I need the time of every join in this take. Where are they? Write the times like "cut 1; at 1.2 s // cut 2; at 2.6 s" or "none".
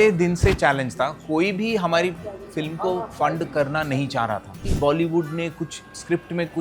cut 1; at 4.6 s